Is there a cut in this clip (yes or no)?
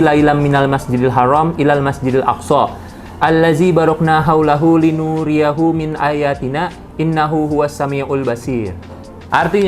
no